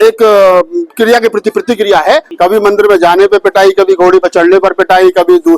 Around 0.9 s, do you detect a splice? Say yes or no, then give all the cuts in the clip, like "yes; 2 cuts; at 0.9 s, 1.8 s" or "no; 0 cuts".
no; 1 cut; at 2.3 s